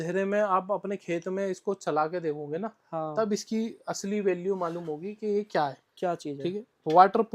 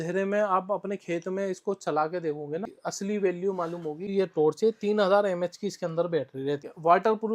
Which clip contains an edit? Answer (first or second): second